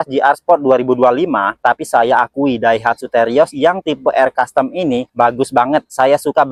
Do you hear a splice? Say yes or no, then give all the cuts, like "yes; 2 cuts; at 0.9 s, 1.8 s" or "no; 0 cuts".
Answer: no; 0 cuts